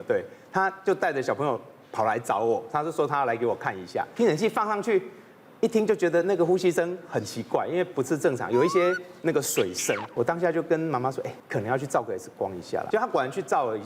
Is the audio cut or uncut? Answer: cut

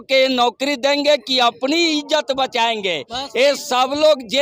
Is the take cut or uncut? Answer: uncut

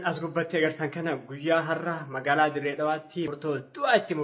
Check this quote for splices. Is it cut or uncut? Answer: cut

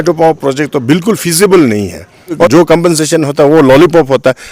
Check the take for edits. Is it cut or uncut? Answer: cut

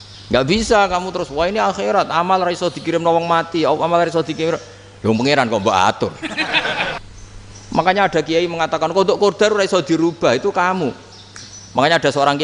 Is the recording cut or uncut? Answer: cut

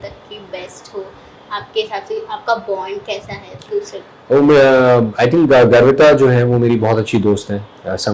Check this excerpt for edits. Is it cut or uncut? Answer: uncut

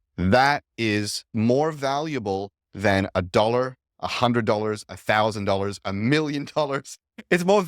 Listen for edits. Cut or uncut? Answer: cut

